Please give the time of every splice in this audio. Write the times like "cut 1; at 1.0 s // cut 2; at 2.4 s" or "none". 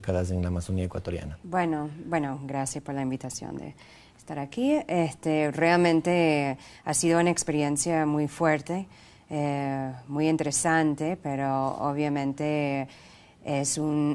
none